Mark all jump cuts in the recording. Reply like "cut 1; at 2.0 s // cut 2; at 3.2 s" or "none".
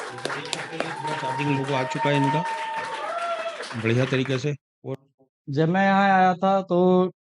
cut 1; at 4.9 s